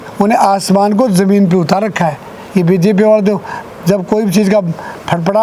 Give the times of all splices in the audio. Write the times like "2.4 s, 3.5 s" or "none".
none

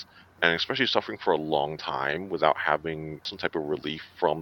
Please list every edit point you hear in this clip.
3.4 s

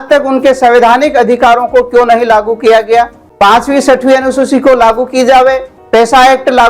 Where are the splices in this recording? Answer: 3.2 s, 5.7 s

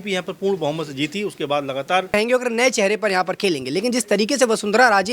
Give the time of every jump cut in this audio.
2.1 s

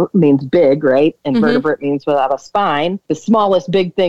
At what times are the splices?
3.0 s

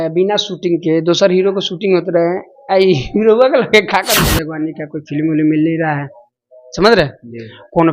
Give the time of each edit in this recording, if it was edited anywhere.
4.1 s

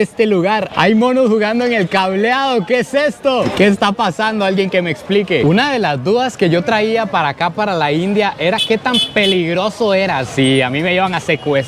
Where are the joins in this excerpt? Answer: none

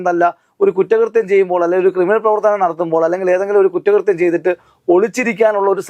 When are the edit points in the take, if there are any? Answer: none

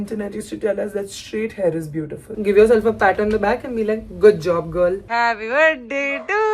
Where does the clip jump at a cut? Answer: 2.3 s, 5.0 s

